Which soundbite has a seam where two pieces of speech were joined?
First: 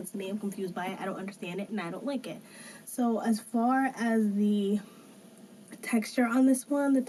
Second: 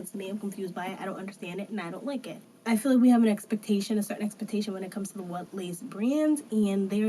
second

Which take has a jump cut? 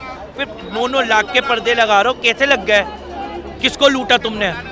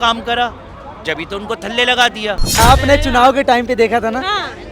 second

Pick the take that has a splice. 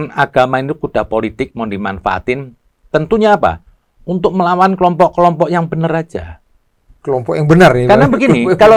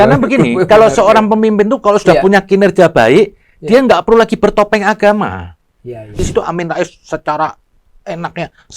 second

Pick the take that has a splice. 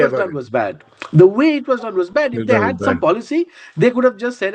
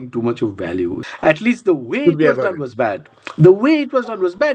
second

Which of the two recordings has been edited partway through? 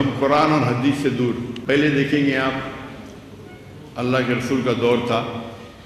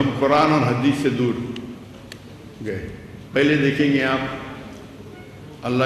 first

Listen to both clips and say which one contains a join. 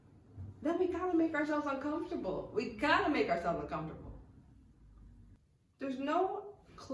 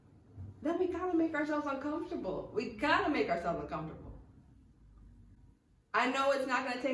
first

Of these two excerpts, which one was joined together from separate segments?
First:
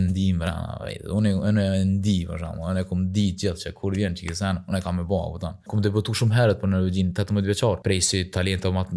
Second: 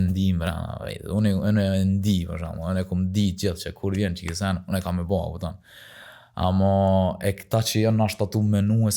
first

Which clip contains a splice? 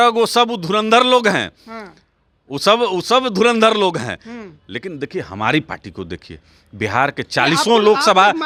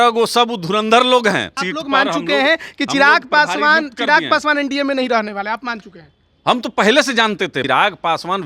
second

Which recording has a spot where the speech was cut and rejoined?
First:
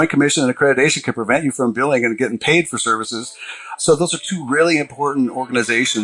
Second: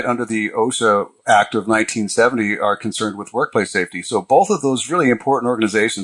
second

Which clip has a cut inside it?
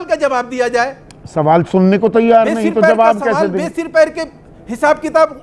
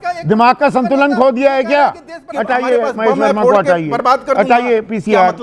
second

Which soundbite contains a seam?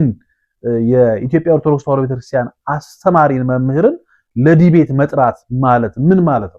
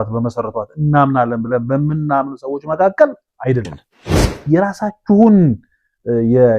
second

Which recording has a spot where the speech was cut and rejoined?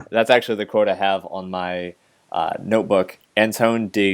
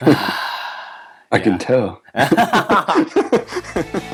first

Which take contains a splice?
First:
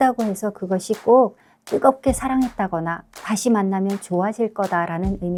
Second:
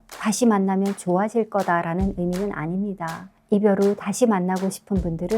second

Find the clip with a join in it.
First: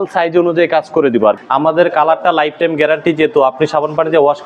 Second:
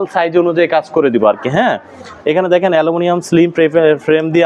first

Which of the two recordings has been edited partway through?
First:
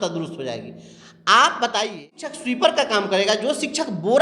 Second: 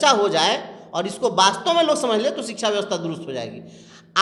first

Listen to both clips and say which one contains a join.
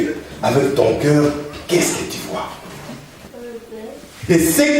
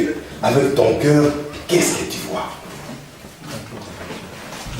first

